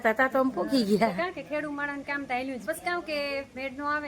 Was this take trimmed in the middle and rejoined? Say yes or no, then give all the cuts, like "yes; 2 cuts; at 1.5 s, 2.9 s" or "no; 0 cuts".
yes; 1 cut; at 2.6 s